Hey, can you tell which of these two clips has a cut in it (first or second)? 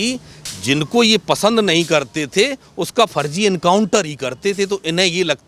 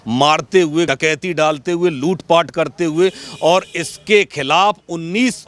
second